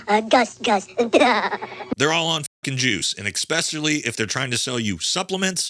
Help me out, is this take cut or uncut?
cut